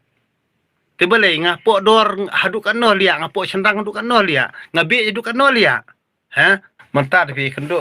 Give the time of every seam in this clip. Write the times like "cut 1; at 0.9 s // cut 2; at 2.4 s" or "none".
cut 1; at 6.7 s